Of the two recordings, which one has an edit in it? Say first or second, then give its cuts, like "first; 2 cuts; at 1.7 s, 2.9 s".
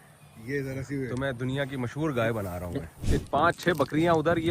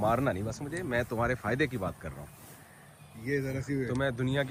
first; 1 cut; at 3.3 s